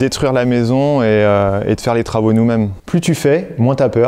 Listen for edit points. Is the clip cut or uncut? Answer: cut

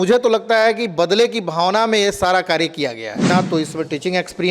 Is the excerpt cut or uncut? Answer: cut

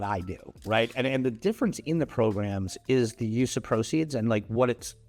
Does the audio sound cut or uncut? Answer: uncut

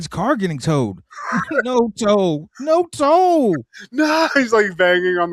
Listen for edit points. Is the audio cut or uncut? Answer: uncut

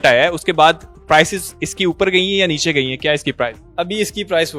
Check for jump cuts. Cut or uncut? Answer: uncut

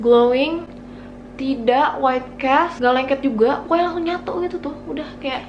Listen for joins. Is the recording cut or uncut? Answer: cut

